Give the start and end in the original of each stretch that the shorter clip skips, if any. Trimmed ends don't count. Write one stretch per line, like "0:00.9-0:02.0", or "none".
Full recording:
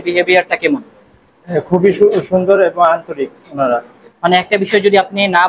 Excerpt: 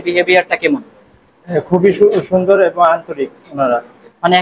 none